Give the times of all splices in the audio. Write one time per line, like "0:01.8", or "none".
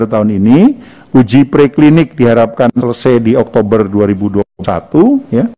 none